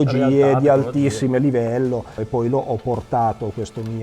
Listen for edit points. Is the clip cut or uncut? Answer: cut